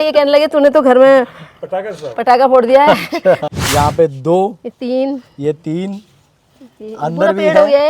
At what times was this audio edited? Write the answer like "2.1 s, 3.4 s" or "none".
3.4 s